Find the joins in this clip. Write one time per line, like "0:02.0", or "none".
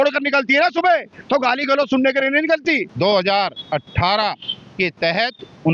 0:02.9